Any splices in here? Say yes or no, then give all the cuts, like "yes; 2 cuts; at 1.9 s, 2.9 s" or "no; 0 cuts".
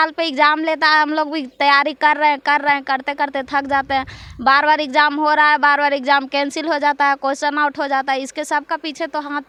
no; 0 cuts